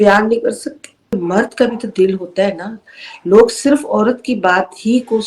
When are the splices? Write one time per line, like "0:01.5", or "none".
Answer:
0:01.2